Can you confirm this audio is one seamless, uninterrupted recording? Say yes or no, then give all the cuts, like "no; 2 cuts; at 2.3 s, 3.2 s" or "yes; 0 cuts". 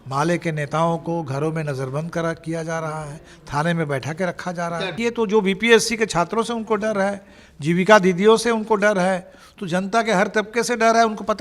no; 1 cut; at 4.9 s